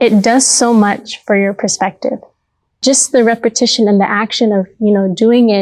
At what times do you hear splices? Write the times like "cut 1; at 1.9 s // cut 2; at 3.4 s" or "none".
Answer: cut 1; at 2.7 s